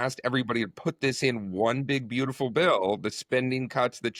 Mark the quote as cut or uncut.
uncut